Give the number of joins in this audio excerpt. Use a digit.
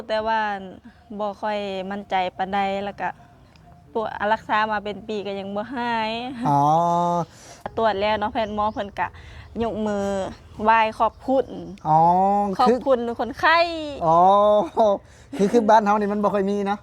1